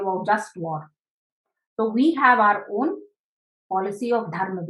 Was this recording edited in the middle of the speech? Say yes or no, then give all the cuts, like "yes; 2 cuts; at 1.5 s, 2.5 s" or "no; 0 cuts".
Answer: no; 0 cuts